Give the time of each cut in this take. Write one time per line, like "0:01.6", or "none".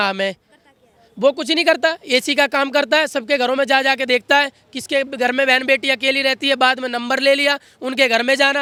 none